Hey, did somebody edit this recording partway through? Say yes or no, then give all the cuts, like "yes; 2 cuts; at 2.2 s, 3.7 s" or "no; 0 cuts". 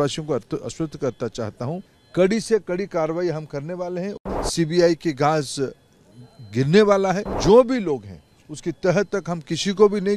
yes; 3 cuts; at 2.0 s, 4.2 s, 7.3 s